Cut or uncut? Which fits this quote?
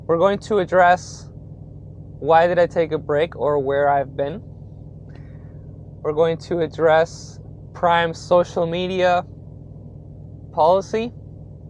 uncut